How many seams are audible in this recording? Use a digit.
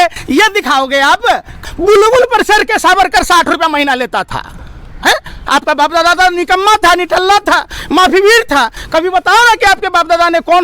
1